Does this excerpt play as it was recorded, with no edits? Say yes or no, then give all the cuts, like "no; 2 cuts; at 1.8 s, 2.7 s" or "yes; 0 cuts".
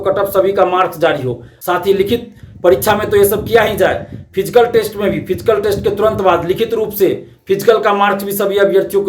no; 1 cut; at 1.5 s